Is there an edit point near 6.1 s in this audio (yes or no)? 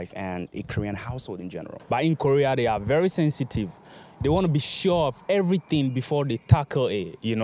no